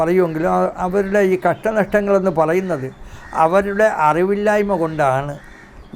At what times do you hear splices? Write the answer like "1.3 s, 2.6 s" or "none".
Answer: none